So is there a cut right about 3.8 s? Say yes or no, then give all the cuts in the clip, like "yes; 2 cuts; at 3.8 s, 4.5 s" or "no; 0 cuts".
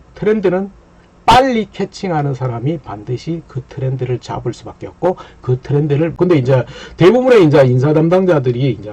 no; 1 cut; at 6.1 s